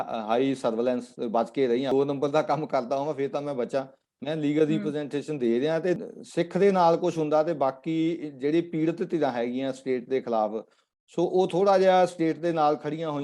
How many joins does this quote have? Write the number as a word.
two